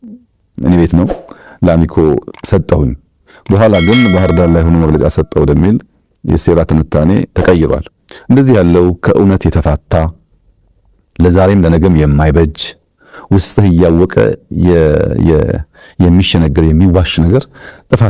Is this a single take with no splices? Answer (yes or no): yes